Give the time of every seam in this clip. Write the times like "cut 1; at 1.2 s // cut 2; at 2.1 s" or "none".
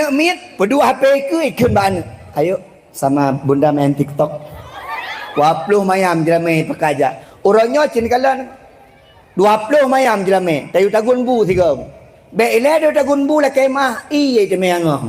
cut 1; at 7.2 s